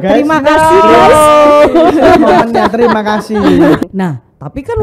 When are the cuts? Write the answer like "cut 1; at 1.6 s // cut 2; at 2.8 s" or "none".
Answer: cut 1; at 3.8 s